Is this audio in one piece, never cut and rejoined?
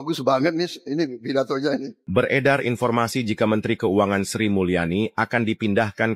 no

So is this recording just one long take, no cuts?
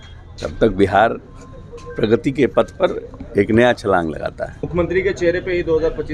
no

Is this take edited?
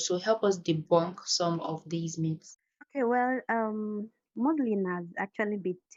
no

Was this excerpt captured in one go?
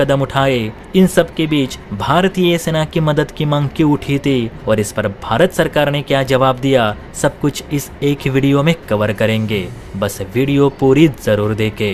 yes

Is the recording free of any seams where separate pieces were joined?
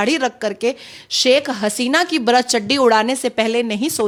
yes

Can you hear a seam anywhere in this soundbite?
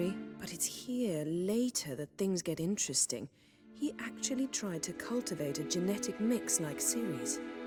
no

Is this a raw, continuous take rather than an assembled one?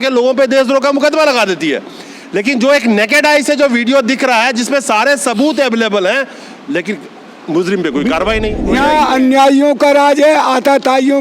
no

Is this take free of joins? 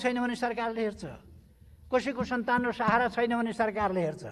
yes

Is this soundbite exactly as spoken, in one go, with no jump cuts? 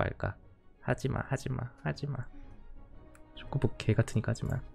yes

